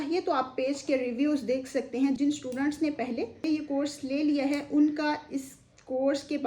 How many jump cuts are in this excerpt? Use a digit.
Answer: 1